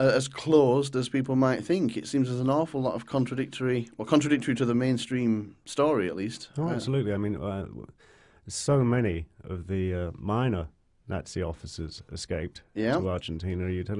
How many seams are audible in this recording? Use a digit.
1